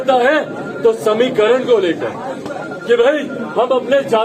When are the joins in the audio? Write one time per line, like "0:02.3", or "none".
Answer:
none